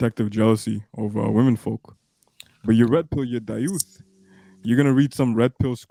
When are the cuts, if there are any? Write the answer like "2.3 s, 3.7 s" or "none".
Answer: none